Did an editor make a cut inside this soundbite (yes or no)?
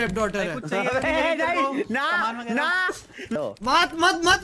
yes